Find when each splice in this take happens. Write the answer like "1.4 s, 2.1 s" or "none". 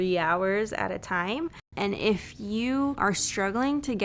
1.6 s, 3.0 s